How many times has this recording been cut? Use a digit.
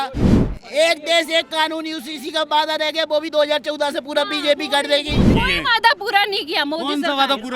1